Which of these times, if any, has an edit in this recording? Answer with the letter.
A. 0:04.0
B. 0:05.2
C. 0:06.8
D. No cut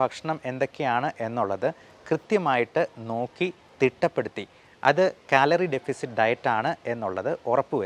D